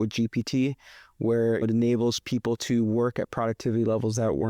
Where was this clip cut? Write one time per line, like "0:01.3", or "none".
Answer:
0:01.6

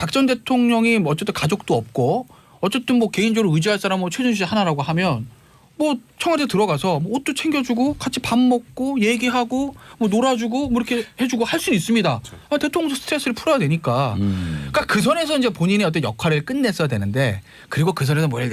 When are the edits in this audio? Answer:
0:14.5

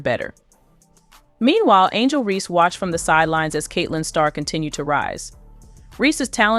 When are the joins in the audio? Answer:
none

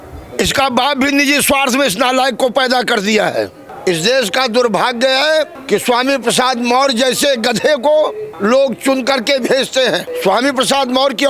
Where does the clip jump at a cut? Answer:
0:03.6
0:05.6
0:08.2
0:10.1

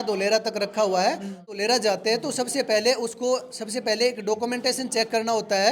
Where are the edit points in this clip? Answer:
0:01.6

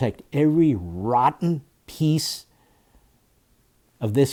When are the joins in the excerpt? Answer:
none

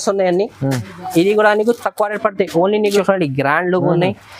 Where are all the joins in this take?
0:03.0

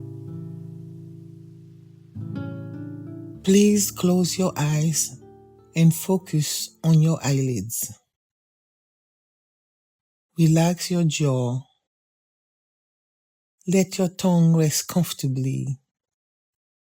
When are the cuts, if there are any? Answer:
0:03.4

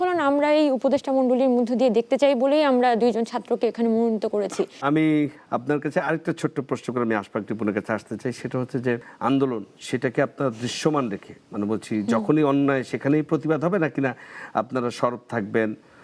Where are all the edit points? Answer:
none

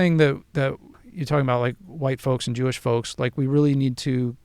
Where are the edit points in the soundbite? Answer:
0:00.9

